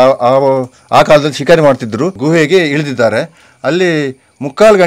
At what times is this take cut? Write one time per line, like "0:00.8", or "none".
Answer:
0:02.1